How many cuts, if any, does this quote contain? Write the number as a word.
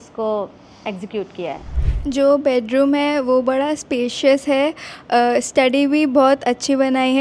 one